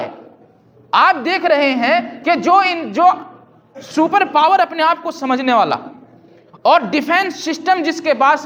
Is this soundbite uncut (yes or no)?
yes